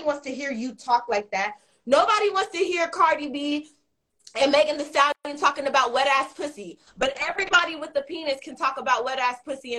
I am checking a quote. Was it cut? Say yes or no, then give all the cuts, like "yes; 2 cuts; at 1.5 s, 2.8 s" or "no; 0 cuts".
no; 0 cuts